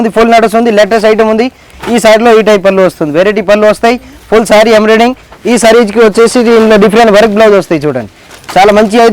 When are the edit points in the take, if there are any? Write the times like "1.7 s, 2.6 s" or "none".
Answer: 1.7 s, 5.3 s, 8.3 s